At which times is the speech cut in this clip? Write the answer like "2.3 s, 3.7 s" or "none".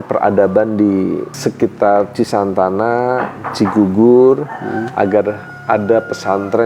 1.3 s